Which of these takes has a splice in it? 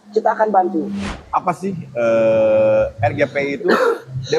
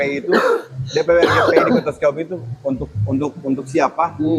first; 1 cut; at 1.0 s

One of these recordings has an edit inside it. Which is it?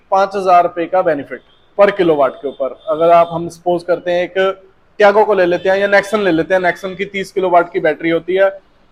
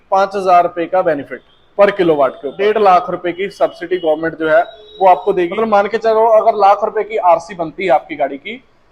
second; 2 cuts; at 2.6 s, 5.5 s

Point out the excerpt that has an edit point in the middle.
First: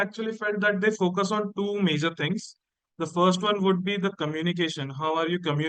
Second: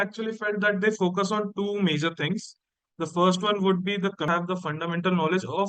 second; 1 cut; at 4.3 s

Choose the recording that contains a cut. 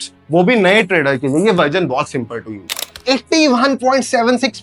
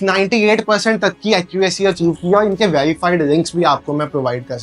first; 1 cut; at 2.9 s

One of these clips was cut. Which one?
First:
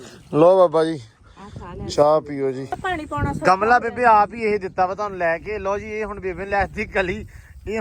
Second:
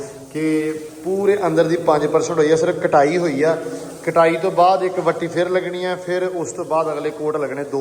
first; 1 cut; at 2.7 s

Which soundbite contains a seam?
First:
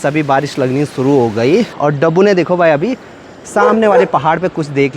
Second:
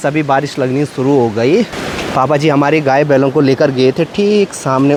first; 1 cut; at 1.7 s

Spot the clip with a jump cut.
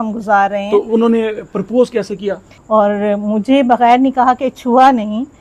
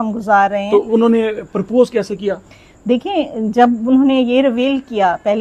first; 1 cut; at 2.5 s

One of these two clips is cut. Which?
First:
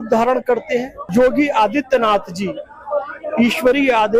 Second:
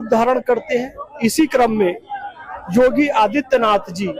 first; 1 cut; at 1.0 s

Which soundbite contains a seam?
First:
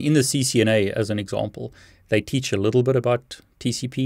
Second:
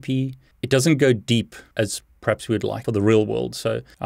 second; 2 cuts; at 1.6 s, 2.8 s

